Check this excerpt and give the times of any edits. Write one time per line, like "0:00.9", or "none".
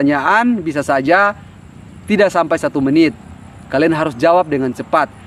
none